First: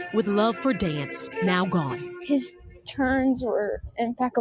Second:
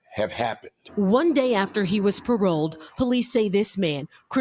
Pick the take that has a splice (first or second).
first